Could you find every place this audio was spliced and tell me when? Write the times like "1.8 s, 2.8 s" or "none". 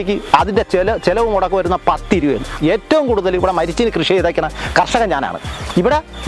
2.6 s

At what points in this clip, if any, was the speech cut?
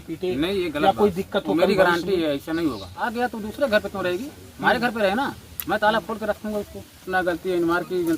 3.1 s, 7.1 s

